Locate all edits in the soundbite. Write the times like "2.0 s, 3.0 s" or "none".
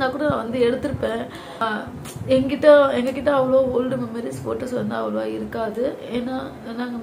1.6 s